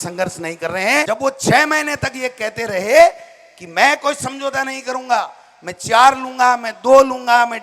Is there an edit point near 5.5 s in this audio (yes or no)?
no